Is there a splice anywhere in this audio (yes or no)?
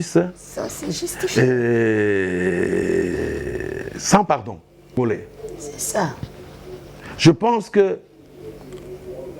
yes